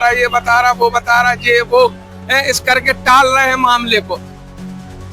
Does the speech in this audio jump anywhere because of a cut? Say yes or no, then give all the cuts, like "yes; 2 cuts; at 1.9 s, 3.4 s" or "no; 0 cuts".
yes; 1 cut; at 4.2 s